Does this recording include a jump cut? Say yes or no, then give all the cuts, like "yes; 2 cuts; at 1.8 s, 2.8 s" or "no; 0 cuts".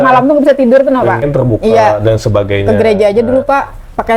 yes; 1 cut; at 1.3 s